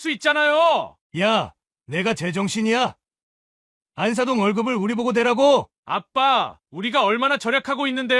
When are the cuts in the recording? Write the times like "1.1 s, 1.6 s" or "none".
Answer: 1.0 s